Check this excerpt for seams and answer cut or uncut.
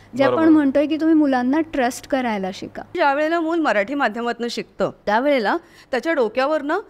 cut